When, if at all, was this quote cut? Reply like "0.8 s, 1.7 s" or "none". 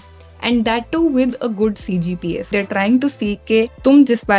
2.5 s